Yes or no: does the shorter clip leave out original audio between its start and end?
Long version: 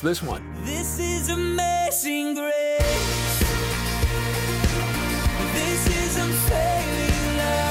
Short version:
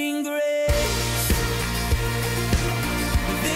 no